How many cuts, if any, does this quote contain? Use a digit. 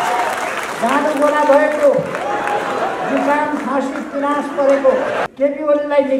1